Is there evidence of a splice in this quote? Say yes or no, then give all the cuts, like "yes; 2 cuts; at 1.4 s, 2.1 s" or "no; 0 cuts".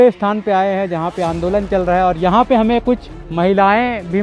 no; 0 cuts